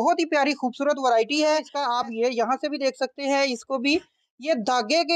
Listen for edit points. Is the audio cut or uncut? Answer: cut